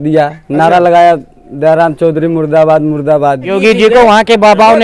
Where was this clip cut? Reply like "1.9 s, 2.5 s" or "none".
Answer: 3.5 s